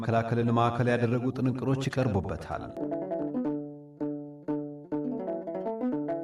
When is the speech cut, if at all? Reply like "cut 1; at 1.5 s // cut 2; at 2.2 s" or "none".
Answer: none